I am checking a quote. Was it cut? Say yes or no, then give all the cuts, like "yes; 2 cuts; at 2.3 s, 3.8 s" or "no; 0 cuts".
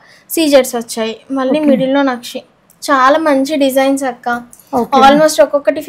no; 0 cuts